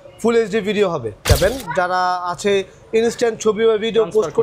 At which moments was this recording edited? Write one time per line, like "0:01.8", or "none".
0:01.2